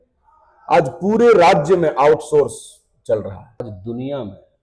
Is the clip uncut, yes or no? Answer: no